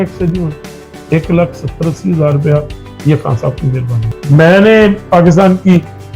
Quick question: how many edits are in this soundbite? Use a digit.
1